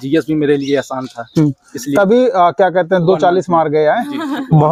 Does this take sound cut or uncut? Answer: uncut